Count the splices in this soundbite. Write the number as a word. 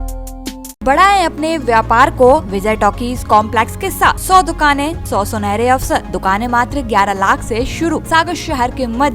six